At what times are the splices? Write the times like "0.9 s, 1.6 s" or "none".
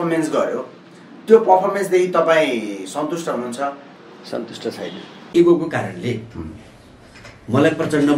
5.2 s